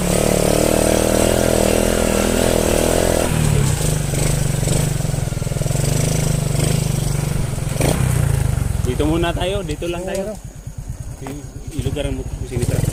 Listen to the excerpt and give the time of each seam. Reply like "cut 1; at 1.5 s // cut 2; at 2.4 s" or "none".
none